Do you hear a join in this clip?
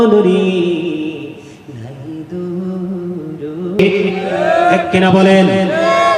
yes; 1 cut; at 3.8 s

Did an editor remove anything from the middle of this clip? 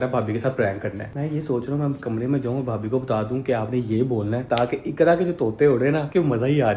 no; 0 cuts

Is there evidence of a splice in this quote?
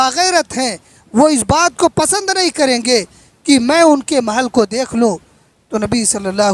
no; 0 cuts

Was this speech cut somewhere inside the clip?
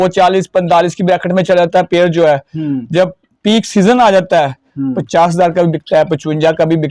no; 0 cuts

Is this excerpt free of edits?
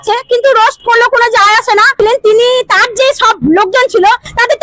no; 1 cut; at 2.0 s

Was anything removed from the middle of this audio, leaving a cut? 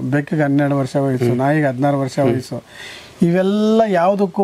no; 0 cuts

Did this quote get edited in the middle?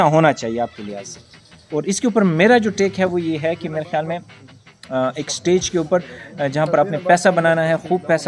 yes; 1 cut; at 1.7 s

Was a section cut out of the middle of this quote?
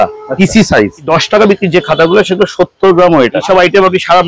yes; 2 cuts; at 1.1 s, 3.4 s

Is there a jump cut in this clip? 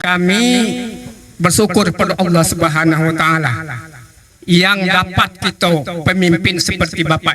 no; 0 cuts

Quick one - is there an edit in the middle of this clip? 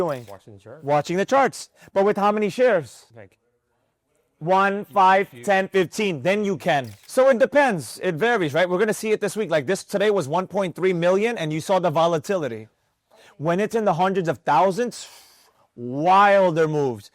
yes; 1 cut; at 7.0 s

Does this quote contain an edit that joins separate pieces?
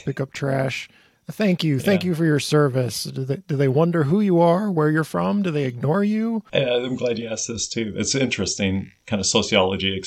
yes; 2 cuts; at 6.4 s, 9.0 s

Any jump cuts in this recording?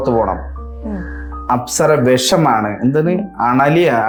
no; 0 cuts

